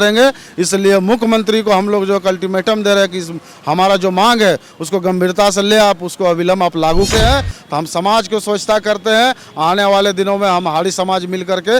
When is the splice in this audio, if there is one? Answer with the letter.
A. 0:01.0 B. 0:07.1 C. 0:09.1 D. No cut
B